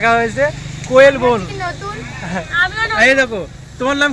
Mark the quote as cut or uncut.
uncut